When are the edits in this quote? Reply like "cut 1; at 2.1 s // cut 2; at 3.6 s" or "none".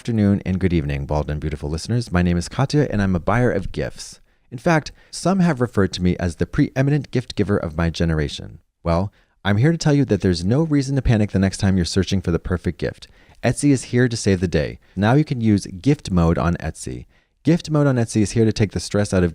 cut 1; at 14.9 s

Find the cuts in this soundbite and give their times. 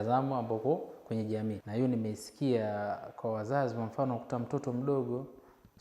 cut 1; at 1.6 s

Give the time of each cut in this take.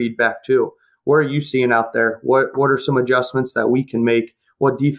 none

